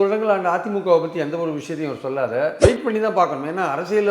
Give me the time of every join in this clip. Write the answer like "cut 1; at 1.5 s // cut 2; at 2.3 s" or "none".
cut 1; at 2.6 s

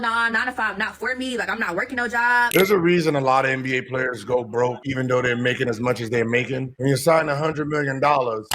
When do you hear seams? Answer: cut 1; at 2.5 s

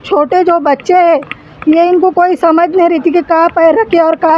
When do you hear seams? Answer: none

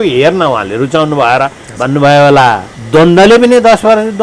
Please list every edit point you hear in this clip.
cut 1; at 2.7 s

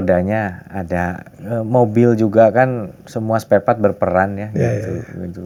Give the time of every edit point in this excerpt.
none

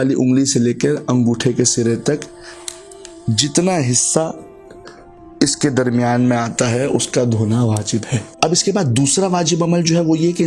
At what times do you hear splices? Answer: cut 1; at 8.3 s

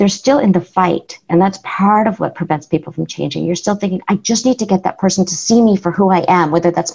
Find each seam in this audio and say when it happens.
cut 1; at 5.4 s

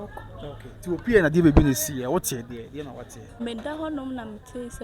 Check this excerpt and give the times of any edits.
cut 1; at 3.4 s

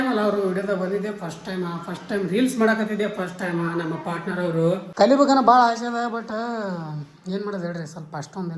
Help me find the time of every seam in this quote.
cut 1; at 4.9 s

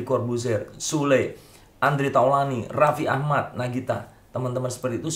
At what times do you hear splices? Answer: none

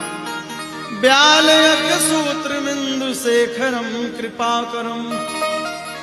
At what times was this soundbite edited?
cut 1; at 4.6 s

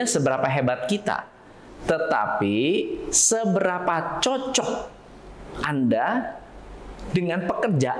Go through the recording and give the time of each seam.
none

